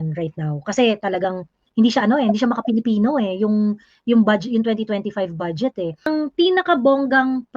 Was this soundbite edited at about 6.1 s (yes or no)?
yes